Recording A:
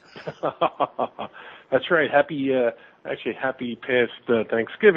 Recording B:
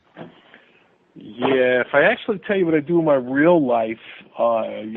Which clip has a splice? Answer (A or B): A